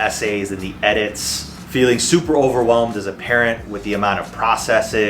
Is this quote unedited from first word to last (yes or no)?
no